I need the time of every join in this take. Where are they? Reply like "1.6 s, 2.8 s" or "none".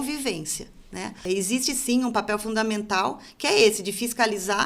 1.2 s